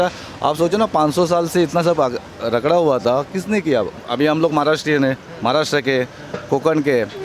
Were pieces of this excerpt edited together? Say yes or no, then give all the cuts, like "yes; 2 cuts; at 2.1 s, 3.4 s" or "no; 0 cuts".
yes; 1 cut; at 4.0 s